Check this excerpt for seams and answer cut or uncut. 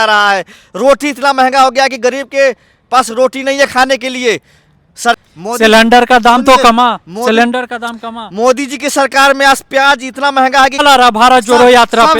cut